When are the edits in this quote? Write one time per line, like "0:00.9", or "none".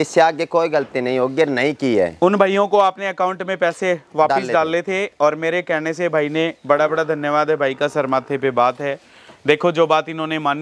none

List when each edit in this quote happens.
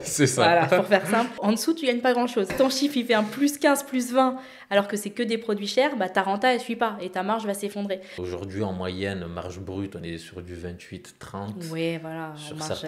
0:01.4
0:02.5
0:08.2

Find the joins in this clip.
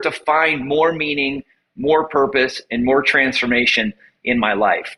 none

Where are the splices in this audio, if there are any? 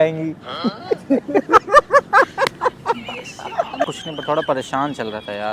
0:01.1
0:03.9

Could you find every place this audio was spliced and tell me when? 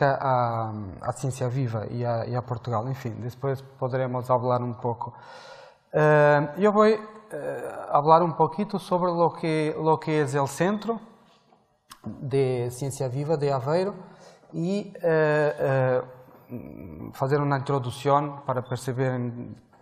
0:05.0

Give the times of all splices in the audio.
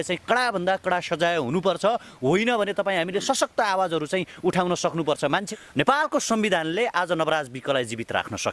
0:05.5

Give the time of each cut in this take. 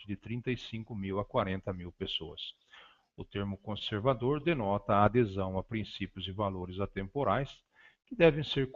0:02.5

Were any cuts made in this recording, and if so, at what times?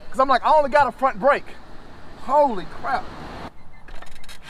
0:03.5

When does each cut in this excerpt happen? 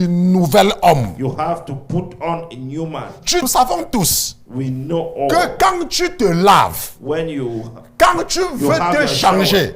0:03.4

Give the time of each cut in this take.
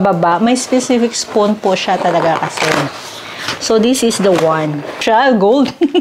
0:05.0

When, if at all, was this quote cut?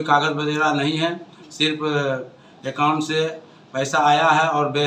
none

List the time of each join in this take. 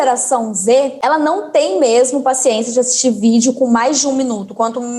0:01.0

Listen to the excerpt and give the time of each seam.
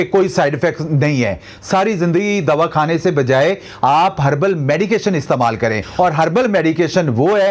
0:05.8

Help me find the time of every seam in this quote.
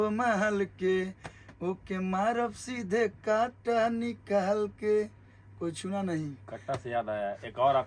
none

